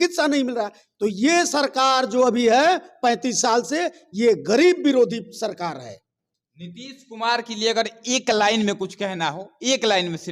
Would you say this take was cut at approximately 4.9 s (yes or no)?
no